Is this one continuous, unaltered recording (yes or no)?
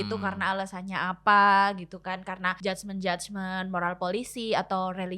no